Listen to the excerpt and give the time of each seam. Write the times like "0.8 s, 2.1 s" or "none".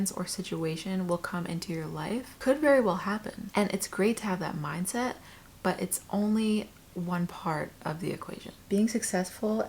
8.5 s